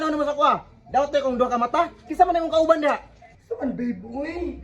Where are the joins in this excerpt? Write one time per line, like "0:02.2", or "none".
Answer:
0:03.1